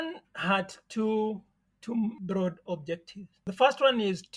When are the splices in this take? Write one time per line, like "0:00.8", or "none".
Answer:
none